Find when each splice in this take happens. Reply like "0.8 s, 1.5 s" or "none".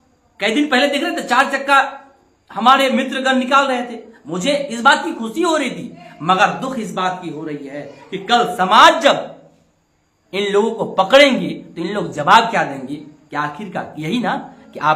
none

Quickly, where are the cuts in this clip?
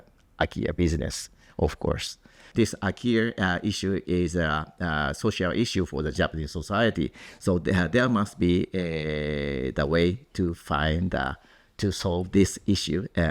2.4 s, 6.1 s

